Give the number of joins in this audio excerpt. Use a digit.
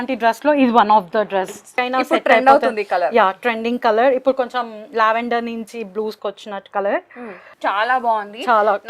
2